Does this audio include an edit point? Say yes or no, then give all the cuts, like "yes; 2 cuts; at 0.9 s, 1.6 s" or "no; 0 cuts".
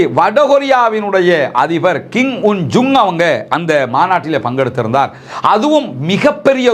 no; 0 cuts